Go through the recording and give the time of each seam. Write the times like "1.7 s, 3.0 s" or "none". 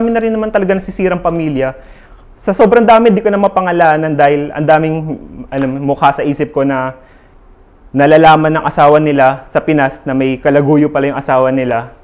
none